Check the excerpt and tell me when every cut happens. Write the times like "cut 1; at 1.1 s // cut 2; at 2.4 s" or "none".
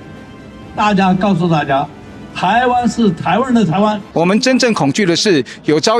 cut 1; at 4.0 s